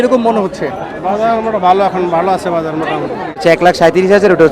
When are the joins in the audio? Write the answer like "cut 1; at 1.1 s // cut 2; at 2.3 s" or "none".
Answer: cut 1; at 3.4 s